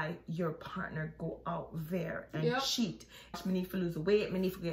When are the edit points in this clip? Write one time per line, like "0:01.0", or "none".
0:03.4